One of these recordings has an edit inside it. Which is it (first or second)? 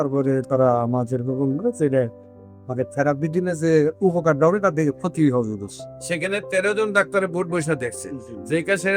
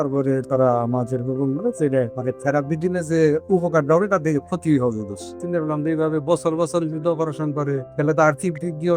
second